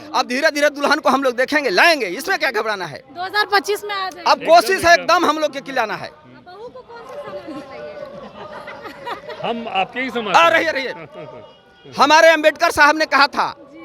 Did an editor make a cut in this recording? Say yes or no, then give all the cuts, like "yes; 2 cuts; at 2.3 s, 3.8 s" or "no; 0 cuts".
no; 0 cuts